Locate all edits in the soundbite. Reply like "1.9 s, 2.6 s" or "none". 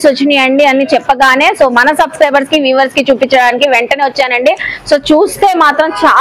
none